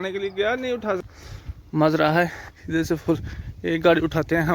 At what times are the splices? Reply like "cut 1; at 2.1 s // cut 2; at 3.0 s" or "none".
cut 1; at 1.0 s